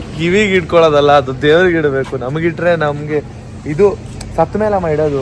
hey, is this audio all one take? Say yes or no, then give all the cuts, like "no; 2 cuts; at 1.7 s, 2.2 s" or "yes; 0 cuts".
yes; 0 cuts